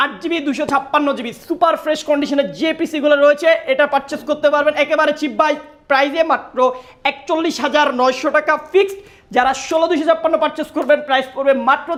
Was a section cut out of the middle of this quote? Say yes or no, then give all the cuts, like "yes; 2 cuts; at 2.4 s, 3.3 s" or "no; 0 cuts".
no; 0 cuts